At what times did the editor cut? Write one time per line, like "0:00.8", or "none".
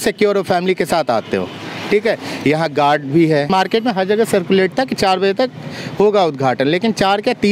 0:03.5